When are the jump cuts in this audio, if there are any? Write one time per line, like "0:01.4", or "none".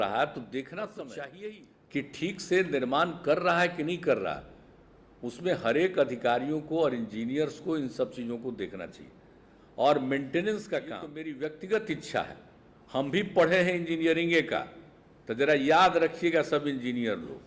0:01.3
0:11.2